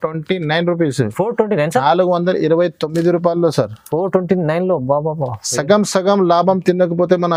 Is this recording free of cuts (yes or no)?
yes